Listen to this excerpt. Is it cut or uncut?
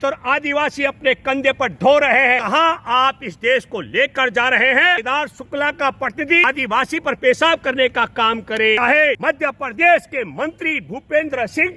cut